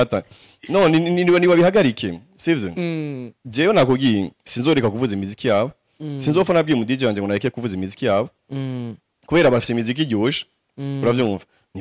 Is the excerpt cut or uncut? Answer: uncut